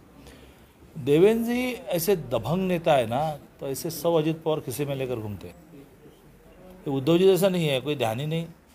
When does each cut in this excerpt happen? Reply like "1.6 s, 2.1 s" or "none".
5.5 s

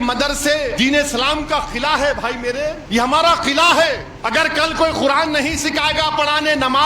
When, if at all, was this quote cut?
0.7 s, 2.8 s, 4.1 s

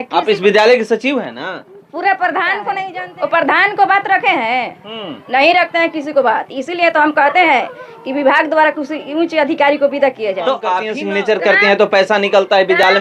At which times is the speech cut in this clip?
3.0 s, 10.9 s

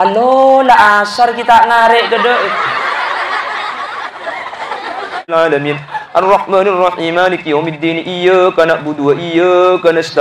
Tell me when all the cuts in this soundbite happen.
5.3 s

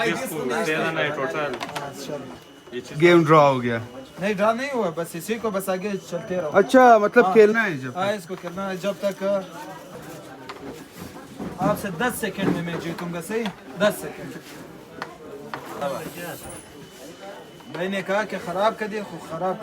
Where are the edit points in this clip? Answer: 9.9 s, 15.8 s

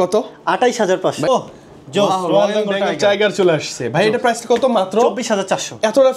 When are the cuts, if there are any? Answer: 1.3 s

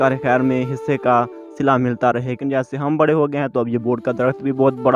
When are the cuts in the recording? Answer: 2.3 s

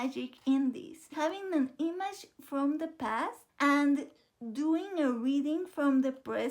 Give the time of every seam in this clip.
1.2 s

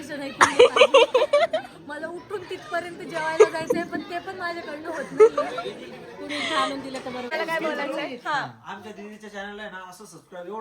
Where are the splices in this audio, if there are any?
7.3 s

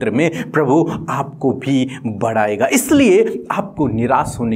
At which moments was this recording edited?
none

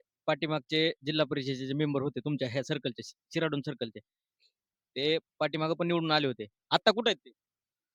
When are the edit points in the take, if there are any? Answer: none

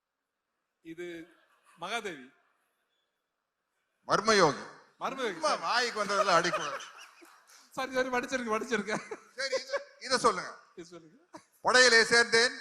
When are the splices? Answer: none

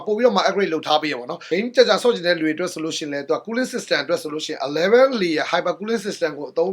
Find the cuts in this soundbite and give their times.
1.3 s

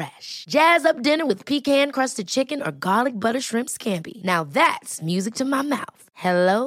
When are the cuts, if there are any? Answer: none

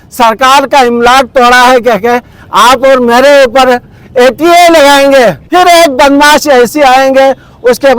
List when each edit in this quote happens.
5.4 s

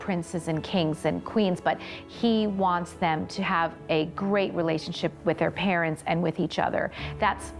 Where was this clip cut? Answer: 5.1 s

